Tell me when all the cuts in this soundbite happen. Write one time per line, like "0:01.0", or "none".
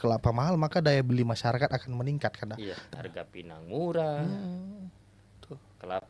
0:02.8